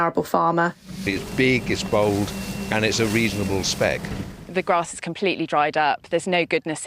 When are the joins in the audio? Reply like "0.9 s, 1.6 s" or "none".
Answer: 1.1 s, 4.4 s